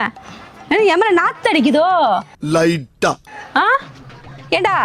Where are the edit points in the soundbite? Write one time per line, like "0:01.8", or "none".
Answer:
none